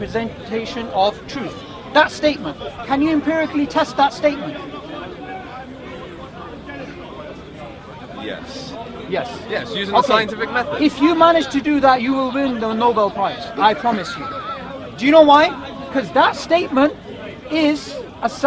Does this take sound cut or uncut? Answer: uncut